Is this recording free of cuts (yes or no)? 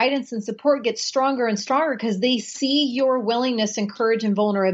yes